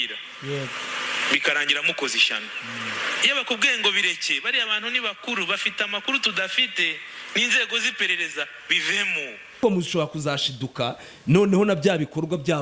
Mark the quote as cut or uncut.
cut